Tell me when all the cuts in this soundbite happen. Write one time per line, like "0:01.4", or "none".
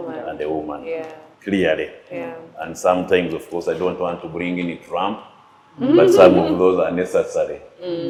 none

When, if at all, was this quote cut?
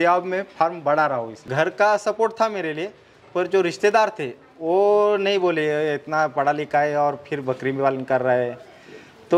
0:01.4

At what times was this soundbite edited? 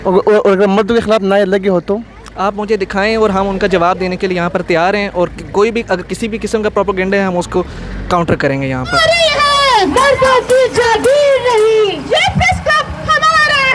0:09.1

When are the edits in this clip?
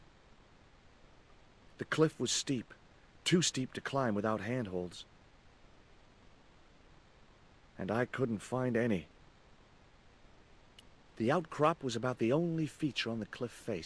0:01.8
0:04.9
0:07.7
0:09.1
0:11.1

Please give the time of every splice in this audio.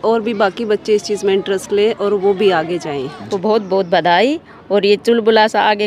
0:03.2

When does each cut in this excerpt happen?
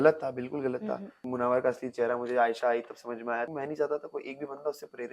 0:01.2
0:03.5

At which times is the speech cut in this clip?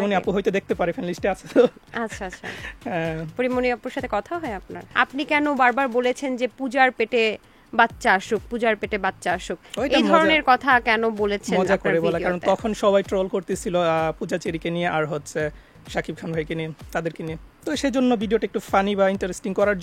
0:04.8

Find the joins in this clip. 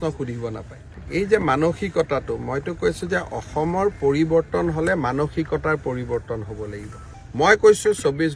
none

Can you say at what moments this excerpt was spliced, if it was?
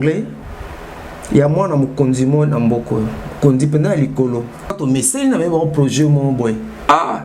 0:04.8

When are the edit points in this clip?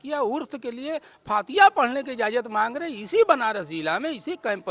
none

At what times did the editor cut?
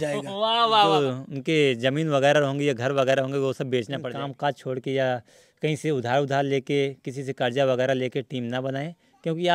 0:00.9
0:04.0

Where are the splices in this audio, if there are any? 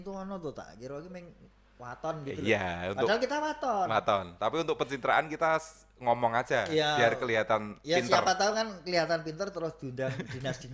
none

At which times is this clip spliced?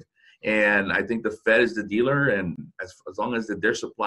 0:02.6

